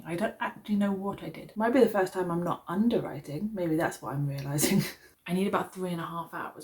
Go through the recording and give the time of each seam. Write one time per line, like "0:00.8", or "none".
0:01.3
0:05.0